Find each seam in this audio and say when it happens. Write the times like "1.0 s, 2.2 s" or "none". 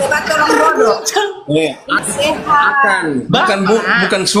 2.0 s